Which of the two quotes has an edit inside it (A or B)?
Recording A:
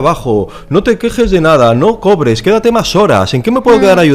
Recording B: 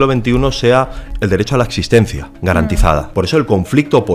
B